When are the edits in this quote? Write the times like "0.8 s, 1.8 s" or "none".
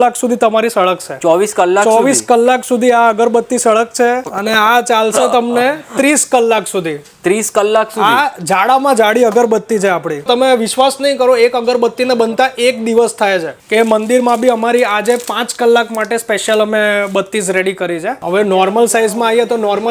4.2 s, 10.3 s, 13.5 s, 18.2 s